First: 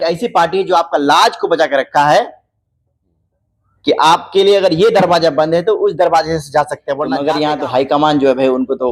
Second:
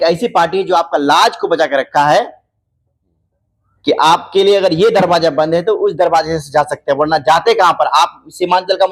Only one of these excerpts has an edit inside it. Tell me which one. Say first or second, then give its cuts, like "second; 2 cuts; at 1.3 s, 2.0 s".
first; 1 cut; at 7.1 s